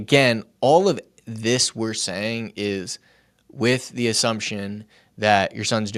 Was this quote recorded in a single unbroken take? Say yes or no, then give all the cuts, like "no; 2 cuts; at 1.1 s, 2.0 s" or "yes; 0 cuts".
yes; 0 cuts